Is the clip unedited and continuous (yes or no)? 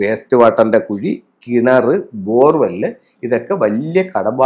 yes